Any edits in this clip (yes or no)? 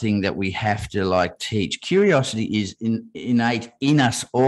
no